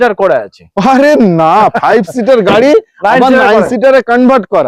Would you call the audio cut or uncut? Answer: uncut